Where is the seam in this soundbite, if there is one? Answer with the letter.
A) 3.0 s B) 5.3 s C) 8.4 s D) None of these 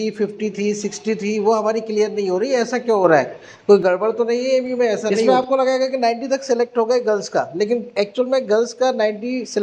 B